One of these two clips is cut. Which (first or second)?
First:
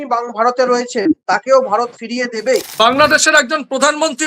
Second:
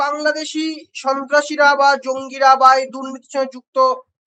first